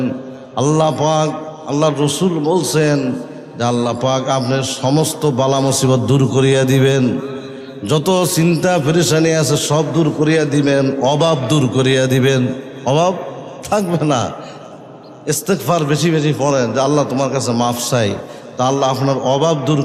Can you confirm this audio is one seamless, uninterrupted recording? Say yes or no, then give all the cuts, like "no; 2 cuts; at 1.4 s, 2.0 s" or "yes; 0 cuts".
yes; 0 cuts